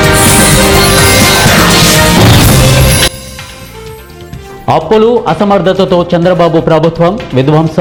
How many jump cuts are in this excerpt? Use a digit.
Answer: 0